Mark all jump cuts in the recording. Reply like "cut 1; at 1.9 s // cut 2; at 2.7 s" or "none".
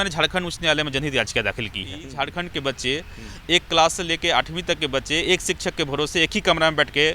cut 1; at 2.1 s